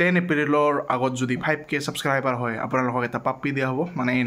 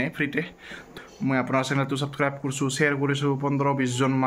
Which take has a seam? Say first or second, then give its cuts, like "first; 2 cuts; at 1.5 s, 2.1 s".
second; 1 cut; at 1.0 s